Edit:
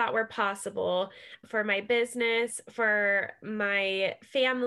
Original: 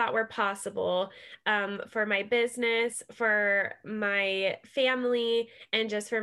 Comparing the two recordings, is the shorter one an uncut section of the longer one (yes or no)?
no